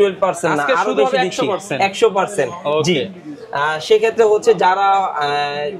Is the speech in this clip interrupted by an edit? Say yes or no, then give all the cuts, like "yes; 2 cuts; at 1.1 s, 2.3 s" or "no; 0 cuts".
no; 0 cuts